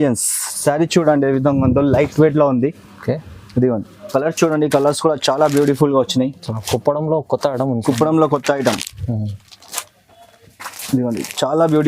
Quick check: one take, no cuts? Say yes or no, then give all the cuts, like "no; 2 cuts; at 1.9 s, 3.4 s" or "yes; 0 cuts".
no; 1 cut; at 4.1 s